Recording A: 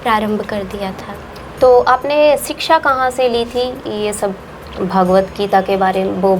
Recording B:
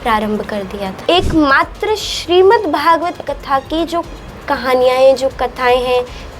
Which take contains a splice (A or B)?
B